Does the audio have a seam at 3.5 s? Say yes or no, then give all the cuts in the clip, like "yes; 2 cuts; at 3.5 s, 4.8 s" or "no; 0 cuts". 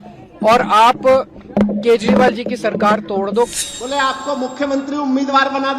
yes; 1 cut; at 3.5 s